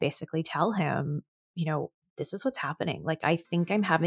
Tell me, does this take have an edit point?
yes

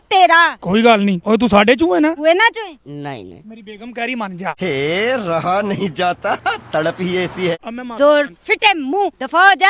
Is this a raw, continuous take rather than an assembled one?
yes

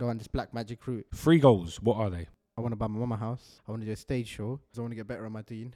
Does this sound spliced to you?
yes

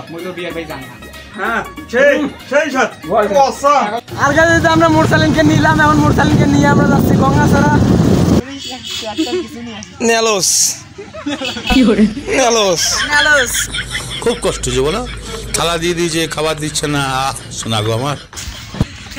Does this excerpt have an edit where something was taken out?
yes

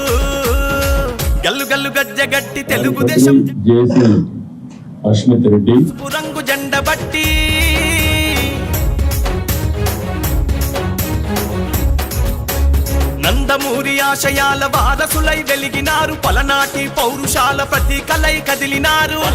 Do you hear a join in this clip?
no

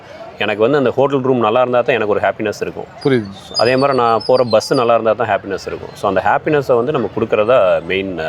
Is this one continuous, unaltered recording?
yes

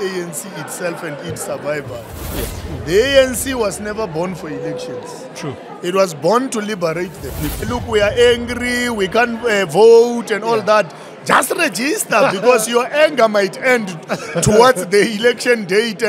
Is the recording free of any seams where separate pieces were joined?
no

